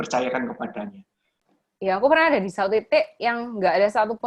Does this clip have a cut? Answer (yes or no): yes